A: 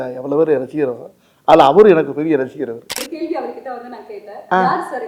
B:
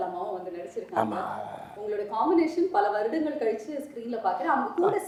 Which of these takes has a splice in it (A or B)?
A